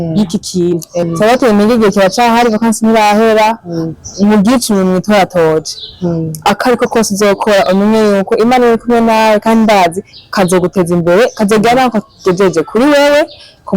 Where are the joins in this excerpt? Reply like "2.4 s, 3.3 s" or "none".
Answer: 1.1 s